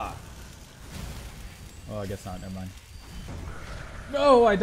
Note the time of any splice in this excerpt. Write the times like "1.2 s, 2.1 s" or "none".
3.3 s